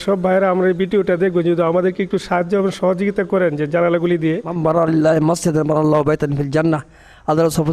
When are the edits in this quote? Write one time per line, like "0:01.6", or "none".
0:04.5